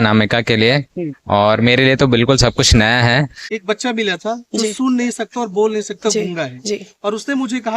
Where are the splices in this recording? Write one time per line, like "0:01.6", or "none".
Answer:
0:03.4